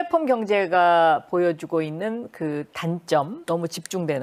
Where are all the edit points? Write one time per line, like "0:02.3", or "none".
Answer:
none